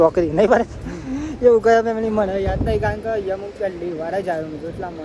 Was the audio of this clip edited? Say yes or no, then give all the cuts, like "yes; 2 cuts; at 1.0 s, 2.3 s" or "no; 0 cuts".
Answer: no; 0 cuts